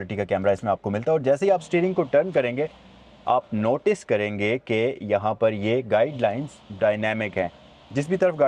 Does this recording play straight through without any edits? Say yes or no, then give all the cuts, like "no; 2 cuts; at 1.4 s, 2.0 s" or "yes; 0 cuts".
yes; 0 cuts